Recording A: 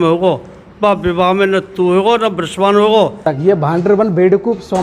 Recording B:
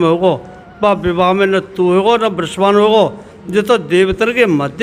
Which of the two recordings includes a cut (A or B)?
A